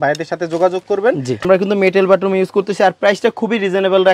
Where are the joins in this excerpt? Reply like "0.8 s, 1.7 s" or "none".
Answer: 1.4 s